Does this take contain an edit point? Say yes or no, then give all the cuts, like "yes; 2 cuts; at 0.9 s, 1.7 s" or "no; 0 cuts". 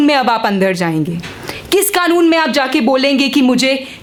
no; 0 cuts